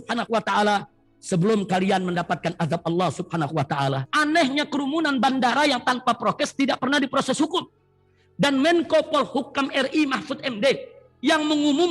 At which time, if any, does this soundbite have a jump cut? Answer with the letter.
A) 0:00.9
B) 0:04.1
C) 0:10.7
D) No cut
B